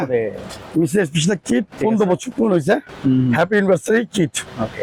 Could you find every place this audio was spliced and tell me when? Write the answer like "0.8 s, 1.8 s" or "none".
none